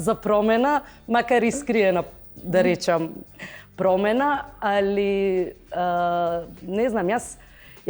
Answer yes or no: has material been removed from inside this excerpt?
no